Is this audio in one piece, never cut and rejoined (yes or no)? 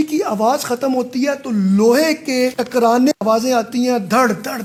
yes